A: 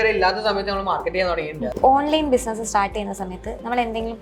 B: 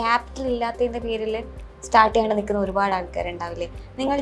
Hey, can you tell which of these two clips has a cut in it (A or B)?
A